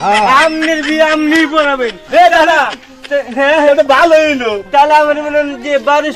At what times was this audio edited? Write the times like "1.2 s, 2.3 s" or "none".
none